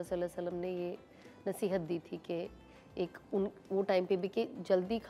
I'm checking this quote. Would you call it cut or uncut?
uncut